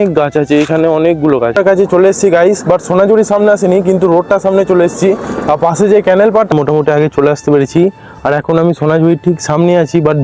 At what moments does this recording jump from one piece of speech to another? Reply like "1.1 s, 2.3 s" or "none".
1.6 s, 6.5 s